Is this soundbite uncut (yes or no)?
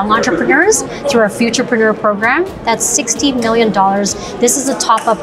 yes